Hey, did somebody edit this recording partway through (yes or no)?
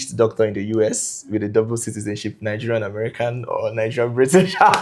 no